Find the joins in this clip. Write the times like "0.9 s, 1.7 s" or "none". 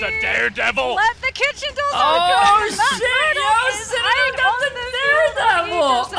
none